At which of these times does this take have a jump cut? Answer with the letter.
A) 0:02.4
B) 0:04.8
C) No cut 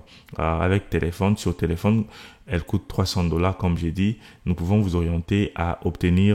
C